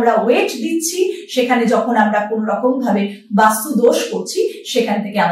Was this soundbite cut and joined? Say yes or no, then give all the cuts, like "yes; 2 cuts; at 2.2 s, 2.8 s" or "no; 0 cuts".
no; 0 cuts